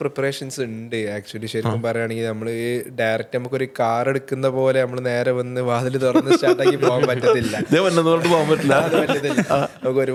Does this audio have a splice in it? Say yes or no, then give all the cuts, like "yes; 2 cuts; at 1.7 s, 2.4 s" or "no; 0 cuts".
no; 0 cuts